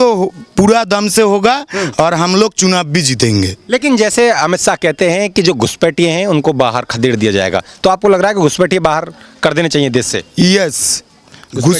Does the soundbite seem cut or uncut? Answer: uncut